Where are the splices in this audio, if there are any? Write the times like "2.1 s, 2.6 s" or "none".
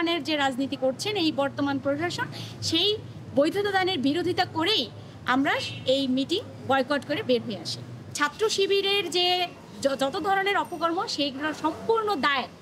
8.2 s